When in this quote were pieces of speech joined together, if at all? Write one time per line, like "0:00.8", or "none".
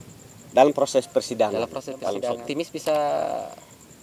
0:02.4